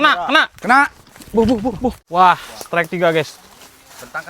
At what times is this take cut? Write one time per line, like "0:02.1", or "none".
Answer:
0:02.0